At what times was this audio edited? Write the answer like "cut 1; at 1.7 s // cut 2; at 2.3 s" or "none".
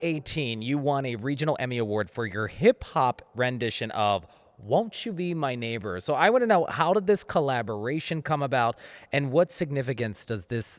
none